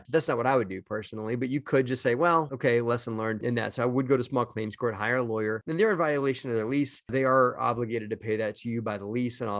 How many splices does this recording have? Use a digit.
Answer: 2